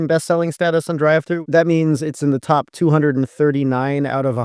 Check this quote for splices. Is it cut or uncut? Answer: cut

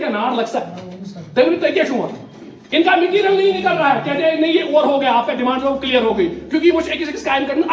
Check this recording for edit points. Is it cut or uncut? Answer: uncut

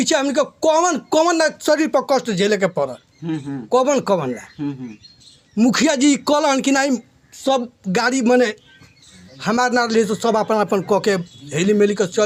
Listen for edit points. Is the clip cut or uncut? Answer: uncut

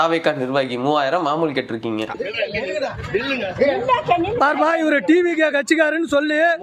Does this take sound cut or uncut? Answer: uncut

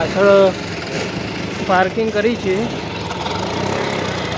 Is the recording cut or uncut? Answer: uncut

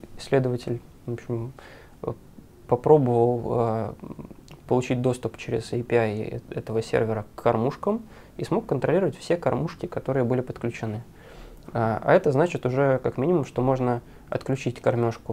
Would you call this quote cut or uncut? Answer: uncut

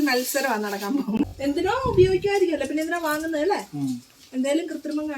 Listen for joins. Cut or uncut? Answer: cut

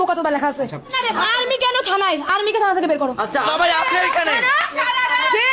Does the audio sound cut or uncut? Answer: cut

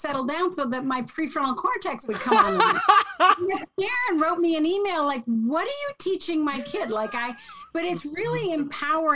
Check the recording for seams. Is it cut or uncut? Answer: uncut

